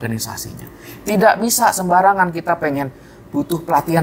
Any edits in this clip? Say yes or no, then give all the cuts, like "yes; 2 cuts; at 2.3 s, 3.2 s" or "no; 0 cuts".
no; 0 cuts